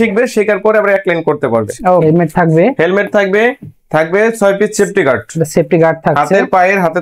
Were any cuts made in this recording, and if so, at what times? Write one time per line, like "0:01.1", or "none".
0:02.0